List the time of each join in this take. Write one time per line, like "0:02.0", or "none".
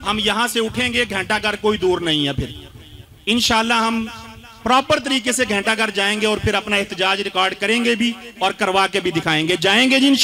none